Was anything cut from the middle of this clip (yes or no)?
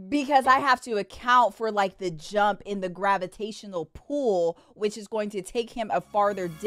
no